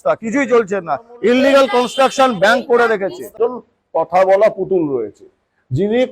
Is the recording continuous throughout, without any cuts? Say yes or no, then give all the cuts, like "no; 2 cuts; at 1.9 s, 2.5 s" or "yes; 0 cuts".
no; 1 cut; at 3.2 s